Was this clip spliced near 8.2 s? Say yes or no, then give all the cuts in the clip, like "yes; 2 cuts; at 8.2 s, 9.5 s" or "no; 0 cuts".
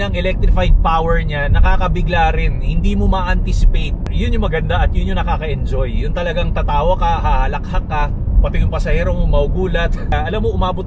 no; 0 cuts